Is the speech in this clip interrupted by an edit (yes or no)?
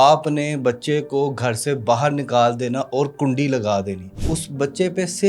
yes